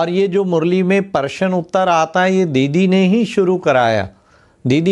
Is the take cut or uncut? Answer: uncut